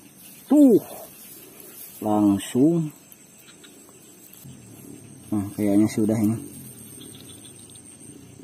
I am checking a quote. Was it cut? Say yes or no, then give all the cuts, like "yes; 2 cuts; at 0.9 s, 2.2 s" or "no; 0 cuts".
yes; 1 cut; at 4.4 s